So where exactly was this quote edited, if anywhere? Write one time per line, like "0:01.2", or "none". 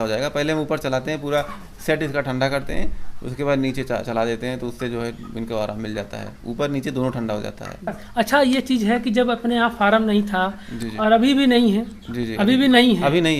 0:08.0